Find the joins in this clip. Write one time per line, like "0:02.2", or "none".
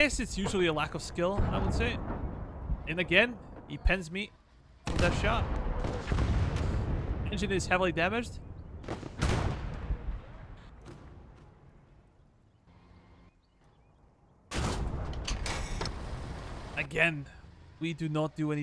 0:13.6